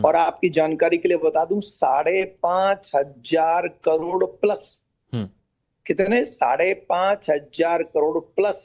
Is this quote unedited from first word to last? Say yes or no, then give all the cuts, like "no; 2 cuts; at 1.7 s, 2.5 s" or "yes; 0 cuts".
no; 1 cut; at 1.1 s